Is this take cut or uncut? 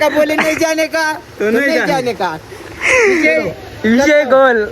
uncut